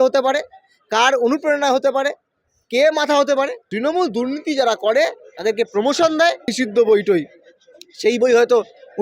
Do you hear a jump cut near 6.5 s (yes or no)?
yes